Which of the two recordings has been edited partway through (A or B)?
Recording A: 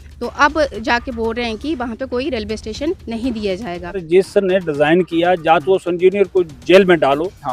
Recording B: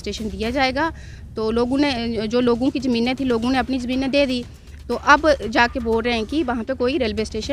A